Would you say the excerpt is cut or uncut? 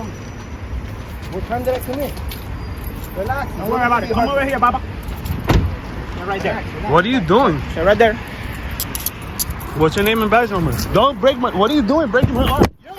uncut